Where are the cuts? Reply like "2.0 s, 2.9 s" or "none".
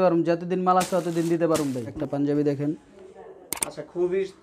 1.9 s